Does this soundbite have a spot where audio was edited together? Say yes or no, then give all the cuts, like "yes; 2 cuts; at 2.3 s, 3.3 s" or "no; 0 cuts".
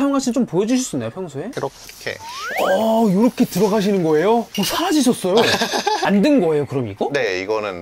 yes; 1 cut; at 6.0 s